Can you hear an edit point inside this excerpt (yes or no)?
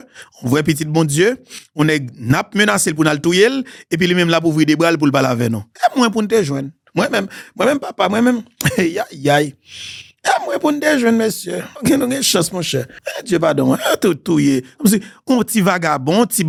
no